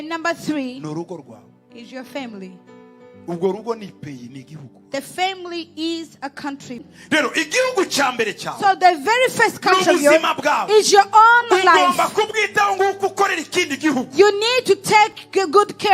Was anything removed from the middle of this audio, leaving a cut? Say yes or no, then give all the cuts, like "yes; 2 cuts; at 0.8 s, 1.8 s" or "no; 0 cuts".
yes; 1 cut; at 6.8 s